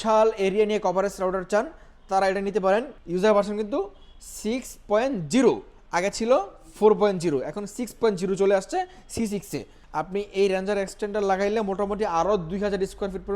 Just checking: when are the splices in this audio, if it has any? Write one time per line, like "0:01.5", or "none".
0:03.0
0:09.8